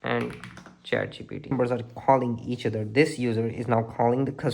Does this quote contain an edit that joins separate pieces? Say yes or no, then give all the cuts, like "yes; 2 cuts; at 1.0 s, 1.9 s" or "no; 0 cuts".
yes; 1 cut; at 1.5 s